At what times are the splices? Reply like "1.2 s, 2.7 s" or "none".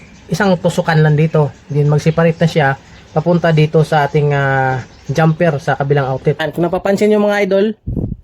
6.4 s

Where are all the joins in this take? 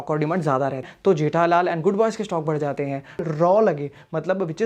0.9 s, 3.2 s

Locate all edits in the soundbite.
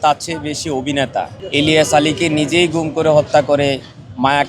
1.4 s

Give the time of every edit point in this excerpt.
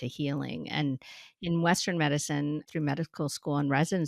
2.7 s

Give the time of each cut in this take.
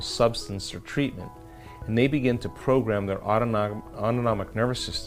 3.7 s

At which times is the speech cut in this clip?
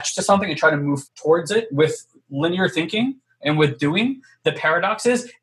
1.0 s

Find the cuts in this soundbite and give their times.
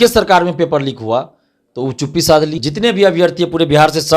2.6 s

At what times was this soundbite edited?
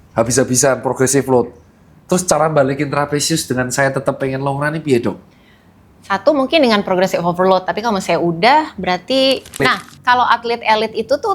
9.5 s

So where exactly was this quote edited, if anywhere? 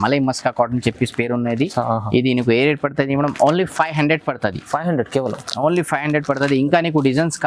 none

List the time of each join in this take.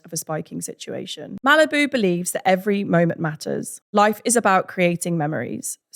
1.3 s

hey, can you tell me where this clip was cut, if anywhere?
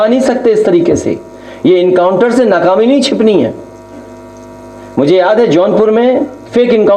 none

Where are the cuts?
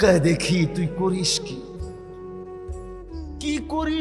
none

